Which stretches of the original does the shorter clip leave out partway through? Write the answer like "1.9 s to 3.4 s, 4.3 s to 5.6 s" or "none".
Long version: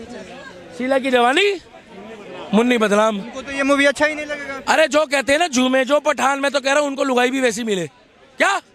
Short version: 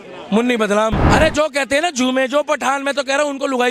3.2 s to 4.6 s